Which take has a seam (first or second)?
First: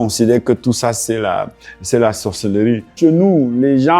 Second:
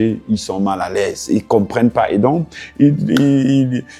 first